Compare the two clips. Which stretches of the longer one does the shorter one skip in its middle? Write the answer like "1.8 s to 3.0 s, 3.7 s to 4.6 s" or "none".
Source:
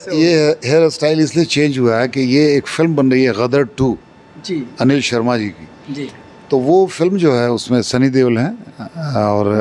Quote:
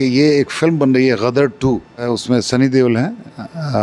4.2 s to 7.4 s

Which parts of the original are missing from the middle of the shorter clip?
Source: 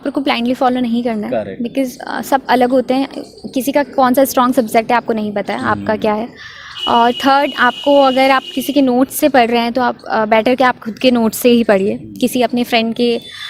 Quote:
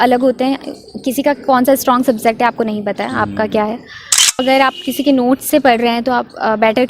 6.9 s to 8.1 s

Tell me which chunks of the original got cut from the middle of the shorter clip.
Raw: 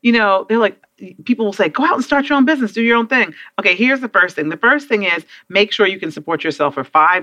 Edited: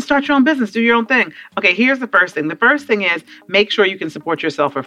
none

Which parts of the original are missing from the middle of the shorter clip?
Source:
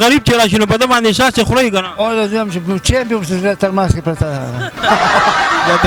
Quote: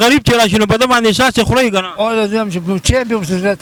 none

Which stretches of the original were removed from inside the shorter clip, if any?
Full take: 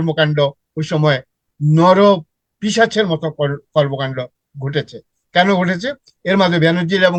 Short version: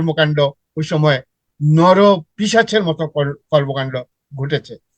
2.3 s to 2.5 s

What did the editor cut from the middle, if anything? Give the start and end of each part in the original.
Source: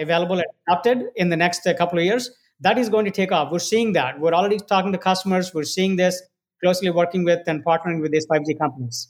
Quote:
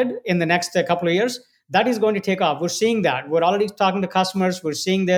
none

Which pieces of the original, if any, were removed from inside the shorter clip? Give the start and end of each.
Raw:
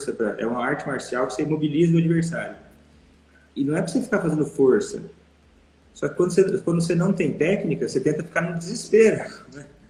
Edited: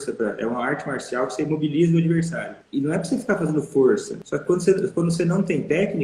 2.5 s to 3.4 s, 5.0 s to 5.9 s

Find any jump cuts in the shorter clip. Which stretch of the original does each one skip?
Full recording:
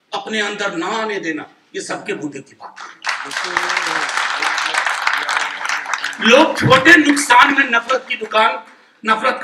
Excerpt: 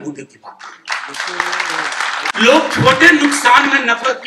4.5 s to 6.2 s

